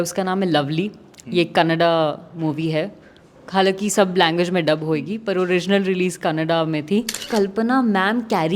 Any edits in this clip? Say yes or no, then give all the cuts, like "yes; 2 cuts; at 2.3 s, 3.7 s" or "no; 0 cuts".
yes; 1 cut; at 7.2 s